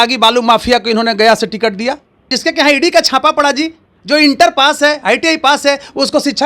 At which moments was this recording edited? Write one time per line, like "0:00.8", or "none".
0:02.3